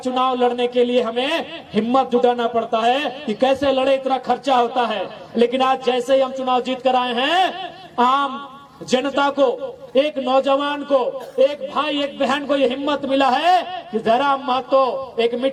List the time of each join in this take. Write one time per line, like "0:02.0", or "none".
none